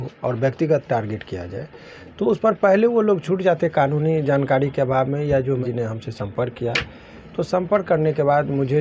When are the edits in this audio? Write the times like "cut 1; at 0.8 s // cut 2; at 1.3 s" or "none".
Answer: cut 1; at 5.6 s